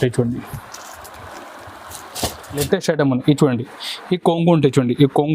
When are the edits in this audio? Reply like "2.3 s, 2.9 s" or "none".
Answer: 2.6 s